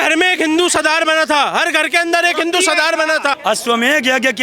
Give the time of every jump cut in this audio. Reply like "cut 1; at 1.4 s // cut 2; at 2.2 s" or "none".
cut 1; at 3.3 s